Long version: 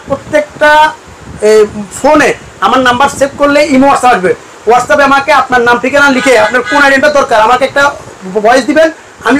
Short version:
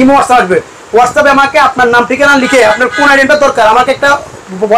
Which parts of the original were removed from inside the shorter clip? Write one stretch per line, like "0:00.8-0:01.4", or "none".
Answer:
none